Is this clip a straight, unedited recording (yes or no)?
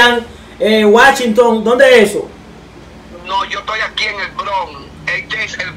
yes